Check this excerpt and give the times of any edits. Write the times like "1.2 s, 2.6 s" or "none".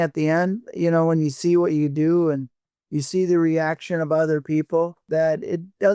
5.0 s